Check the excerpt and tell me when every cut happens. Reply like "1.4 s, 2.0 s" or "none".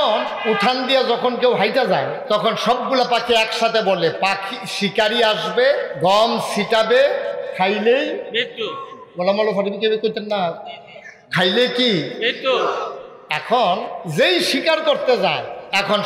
none